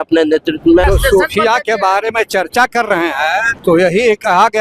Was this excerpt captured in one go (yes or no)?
no